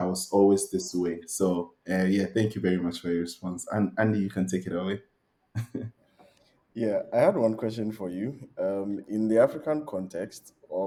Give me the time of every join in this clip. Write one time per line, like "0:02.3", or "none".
none